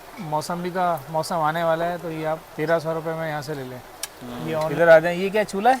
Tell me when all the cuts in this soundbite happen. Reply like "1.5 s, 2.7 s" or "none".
4.7 s